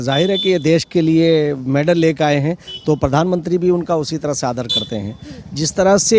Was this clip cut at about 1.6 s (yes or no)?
no